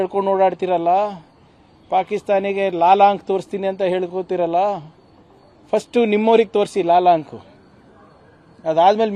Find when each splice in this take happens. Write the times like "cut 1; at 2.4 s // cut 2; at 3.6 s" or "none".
none